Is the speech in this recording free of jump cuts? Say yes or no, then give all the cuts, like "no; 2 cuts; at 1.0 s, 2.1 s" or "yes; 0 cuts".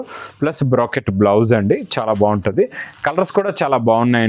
yes; 0 cuts